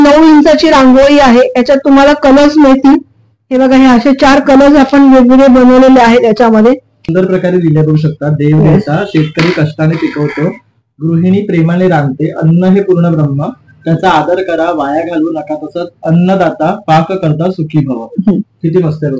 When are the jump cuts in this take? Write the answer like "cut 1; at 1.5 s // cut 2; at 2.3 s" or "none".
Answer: cut 1; at 7.1 s